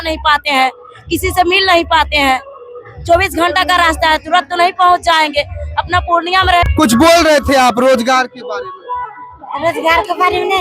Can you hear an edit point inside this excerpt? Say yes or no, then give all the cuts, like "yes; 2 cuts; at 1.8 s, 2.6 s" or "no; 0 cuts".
yes; 1 cut; at 6.6 s